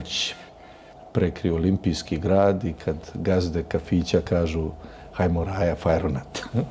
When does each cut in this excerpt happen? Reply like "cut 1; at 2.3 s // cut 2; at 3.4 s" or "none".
none